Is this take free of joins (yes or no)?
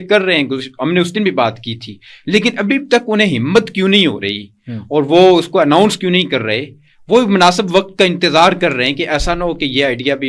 yes